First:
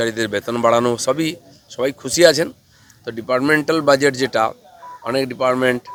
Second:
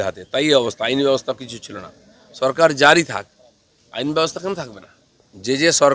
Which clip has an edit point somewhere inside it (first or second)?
second